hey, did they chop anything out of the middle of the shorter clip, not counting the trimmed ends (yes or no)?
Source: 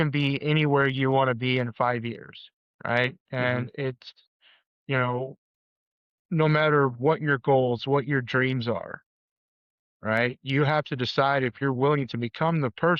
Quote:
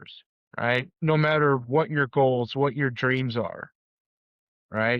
yes